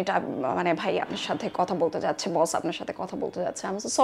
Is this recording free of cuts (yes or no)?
yes